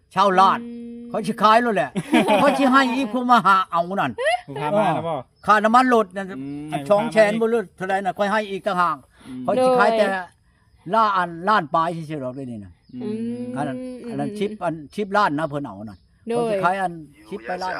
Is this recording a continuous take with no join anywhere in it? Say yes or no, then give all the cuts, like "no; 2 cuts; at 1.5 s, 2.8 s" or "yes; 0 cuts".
yes; 0 cuts